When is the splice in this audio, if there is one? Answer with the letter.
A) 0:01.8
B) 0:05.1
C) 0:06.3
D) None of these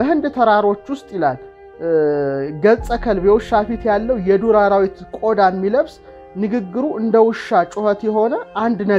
D